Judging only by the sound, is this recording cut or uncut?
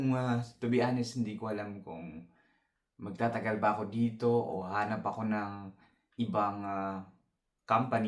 uncut